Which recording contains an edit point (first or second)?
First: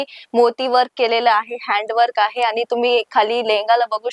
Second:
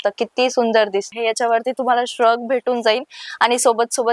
second